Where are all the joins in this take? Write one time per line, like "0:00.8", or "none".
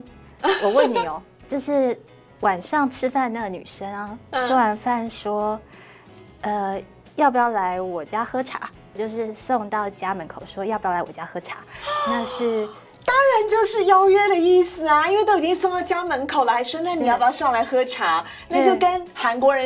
0:01.3
0:09.0